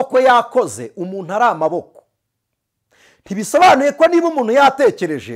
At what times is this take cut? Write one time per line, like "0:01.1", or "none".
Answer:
none